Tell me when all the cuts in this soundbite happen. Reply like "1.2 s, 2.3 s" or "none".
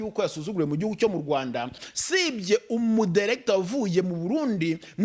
1.8 s